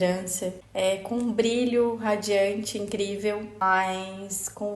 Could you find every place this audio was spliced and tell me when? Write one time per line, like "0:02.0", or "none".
0:03.5